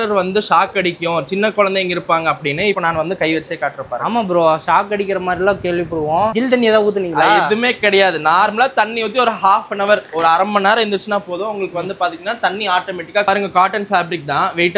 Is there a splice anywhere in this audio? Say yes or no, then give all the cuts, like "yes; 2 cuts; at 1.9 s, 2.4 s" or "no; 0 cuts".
yes; 2 cuts; at 6.3 s, 13.3 s